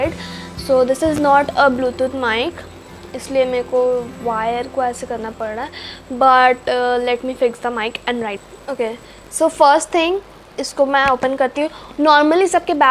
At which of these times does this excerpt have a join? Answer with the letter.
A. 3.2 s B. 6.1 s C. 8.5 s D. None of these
C